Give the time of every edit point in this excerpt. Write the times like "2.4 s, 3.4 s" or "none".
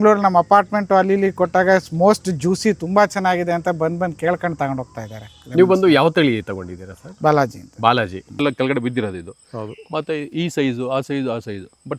8.4 s